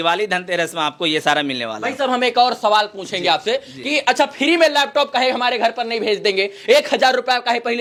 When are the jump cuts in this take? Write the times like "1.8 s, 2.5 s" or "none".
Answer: none